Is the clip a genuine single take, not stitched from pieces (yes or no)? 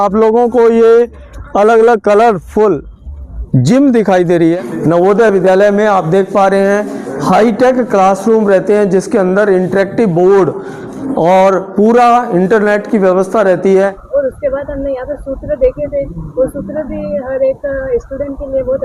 no